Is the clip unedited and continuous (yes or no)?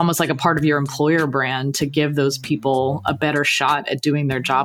yes